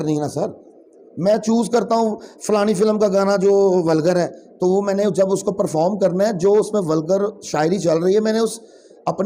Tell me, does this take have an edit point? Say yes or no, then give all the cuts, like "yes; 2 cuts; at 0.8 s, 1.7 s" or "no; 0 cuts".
no; 0 cuts